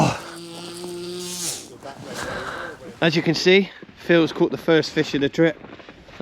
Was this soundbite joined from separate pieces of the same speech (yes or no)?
yes